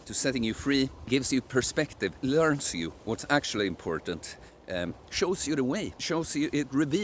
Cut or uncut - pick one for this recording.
cut